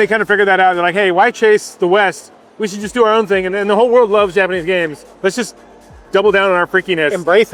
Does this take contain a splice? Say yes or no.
no